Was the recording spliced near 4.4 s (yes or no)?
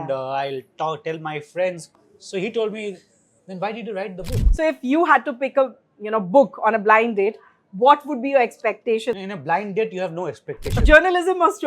yes